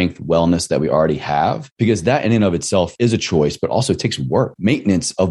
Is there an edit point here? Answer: yes; 3 cuts; at 1.7 s, 2.9 s, 4.5 s

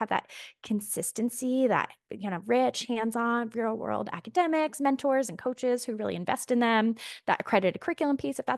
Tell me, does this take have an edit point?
no; 0 cuts

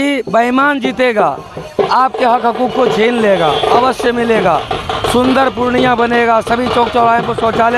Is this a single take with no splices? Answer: yes; 0 cuts

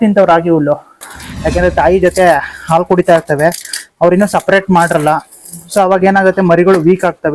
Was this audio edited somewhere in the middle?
yes; 1 cut; at 1.2 s

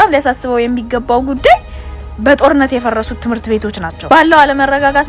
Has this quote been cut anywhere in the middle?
no; 0 cuts

